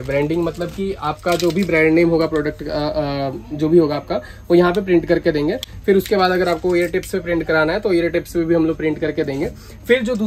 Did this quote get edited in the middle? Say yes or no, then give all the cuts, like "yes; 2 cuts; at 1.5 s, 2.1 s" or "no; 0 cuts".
no; 0 cuts